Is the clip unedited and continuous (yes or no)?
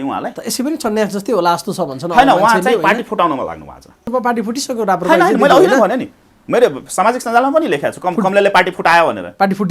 no